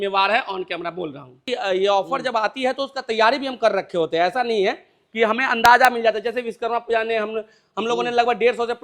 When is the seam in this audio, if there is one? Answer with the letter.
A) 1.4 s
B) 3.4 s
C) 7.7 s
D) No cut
A